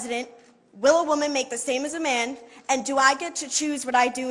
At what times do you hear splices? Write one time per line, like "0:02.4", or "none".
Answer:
none